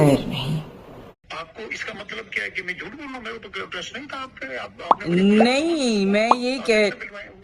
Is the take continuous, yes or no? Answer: no